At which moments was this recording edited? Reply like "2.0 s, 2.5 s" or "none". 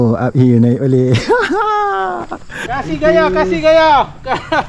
2.5 s